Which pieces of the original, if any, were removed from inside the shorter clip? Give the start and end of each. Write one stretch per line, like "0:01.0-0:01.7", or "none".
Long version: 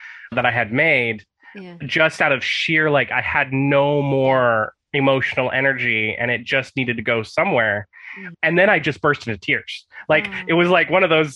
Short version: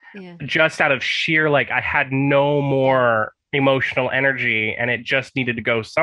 none